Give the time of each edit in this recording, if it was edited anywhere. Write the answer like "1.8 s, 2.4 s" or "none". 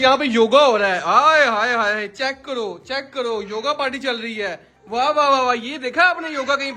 none